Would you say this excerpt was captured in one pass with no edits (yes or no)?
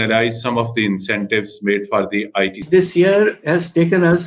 no